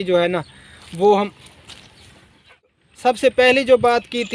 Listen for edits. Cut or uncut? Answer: cut